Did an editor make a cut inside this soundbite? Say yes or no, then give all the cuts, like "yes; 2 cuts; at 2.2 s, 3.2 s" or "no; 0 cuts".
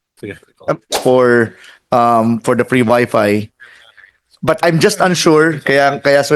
yes; 1 cut; at 0.9 s